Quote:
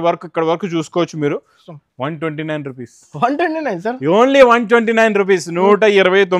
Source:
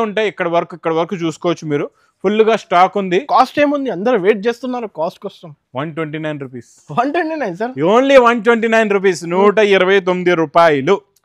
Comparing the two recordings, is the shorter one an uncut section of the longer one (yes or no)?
no